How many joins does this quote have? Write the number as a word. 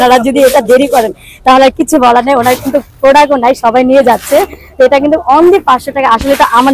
zero